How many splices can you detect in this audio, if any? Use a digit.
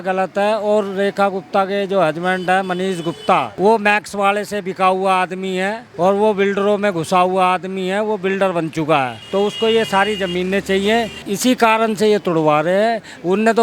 4